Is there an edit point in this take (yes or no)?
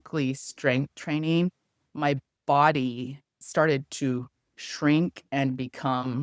yes